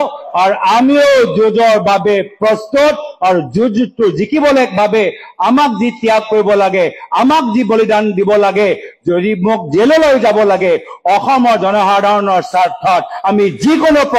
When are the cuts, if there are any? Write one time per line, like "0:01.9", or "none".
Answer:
none